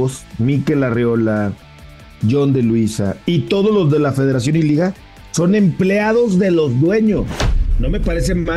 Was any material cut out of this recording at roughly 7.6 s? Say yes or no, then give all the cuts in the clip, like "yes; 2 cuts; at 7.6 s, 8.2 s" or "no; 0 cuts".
yes; 1 cut; at 7.6 s